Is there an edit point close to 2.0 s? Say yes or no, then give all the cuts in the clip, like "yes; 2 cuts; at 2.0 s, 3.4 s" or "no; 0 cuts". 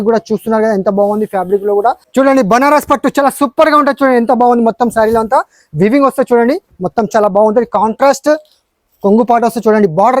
yes; 1 cut; at 2.0 s